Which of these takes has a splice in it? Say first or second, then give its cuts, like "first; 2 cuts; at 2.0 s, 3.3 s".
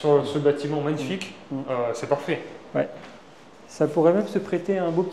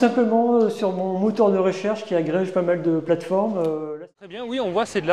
second; 1 cut; at 3.9 s